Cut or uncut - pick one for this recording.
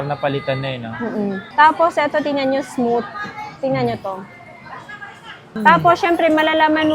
cut